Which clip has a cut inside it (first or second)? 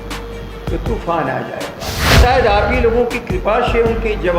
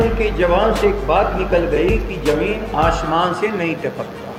first